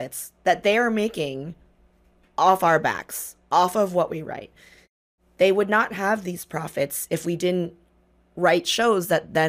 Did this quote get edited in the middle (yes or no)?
no